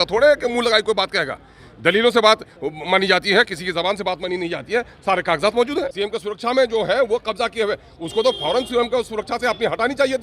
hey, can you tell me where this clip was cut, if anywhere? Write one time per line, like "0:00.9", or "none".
0:05.9